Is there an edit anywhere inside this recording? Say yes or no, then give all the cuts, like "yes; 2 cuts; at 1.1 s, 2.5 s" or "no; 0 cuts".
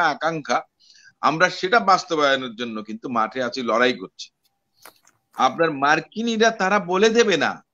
no; 0 cuts